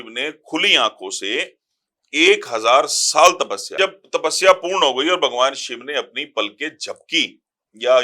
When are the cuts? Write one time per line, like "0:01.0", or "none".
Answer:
0:03.7

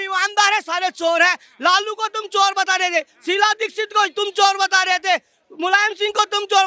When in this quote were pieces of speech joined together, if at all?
none

